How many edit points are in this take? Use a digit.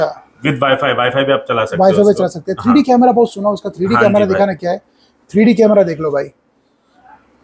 0